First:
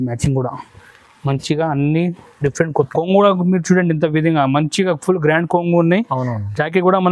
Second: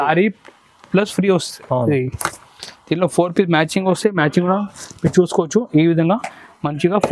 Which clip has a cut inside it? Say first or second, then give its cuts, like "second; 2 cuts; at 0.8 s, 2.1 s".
first; 1 cut; at 2.9 s